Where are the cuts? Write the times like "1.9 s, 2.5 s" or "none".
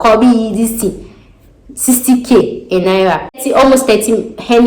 3.4 s